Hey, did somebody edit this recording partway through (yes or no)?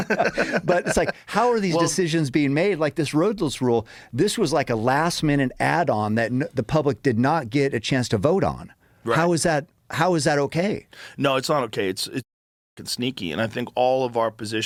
no